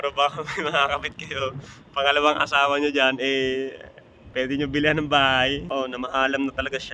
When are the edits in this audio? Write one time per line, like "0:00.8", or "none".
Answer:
0:05.7

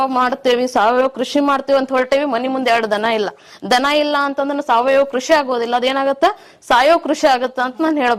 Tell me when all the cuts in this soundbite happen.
none

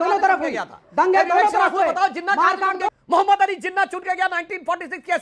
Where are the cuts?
0:02.9

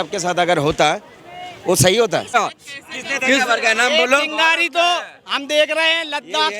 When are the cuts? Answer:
0:02.3

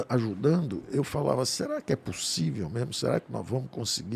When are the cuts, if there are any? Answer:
none

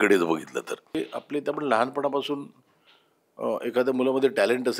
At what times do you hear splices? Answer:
0:00.9

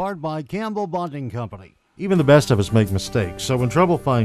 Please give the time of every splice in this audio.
0:02.1

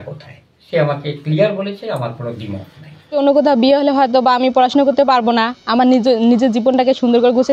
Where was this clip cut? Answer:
0:03.2

